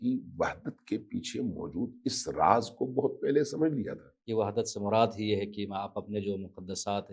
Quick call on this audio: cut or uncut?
cut